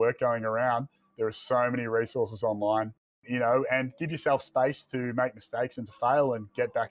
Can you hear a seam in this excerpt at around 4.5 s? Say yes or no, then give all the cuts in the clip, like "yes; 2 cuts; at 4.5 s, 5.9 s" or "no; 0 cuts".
no; 1 cut; at 3.2 s